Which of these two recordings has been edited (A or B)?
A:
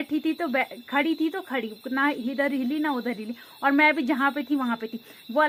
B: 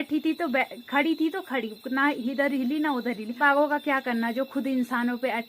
B